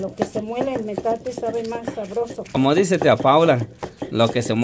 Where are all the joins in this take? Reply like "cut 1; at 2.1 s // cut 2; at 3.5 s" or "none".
cut 1; at 2.6 s

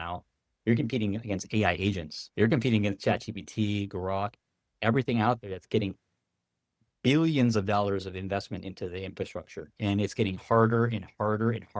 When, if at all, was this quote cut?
cut 1; at 2.2 s

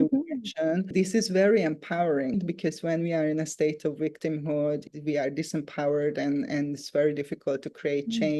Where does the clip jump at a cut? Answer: cut 1; at 0.9 s // cut 2; at 2.4 s

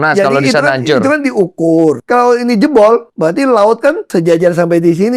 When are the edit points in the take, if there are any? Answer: cut 1; at 2.0 s // cut 2; at 3.1 s // cut 3; at 4.0 s

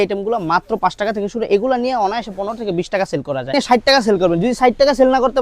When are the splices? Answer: cut 1; at 3.5 s

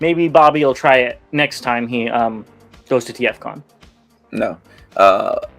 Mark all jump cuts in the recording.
none

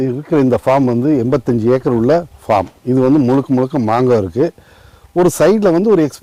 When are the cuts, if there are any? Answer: none

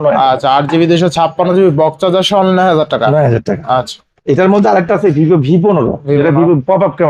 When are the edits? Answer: none

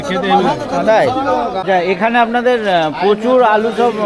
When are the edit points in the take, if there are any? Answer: cut 1; at 1.6 s

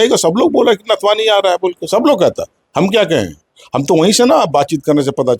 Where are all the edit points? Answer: none

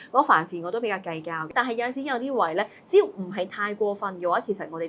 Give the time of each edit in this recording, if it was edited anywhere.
cut 1; at 1.5 s

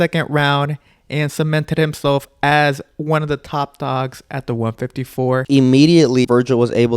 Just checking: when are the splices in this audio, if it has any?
cut 1; at 5.4 s // cut 2; at 6.2 s

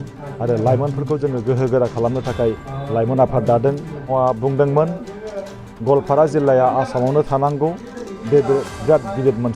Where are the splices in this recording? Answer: cut 1; at 4.0 s

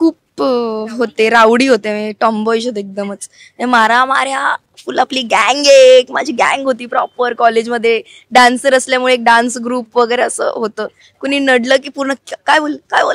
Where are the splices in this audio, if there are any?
none

